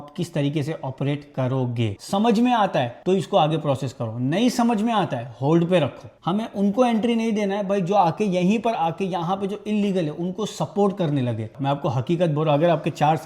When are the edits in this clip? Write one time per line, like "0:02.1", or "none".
0:02.0
0:06.1
0:11.5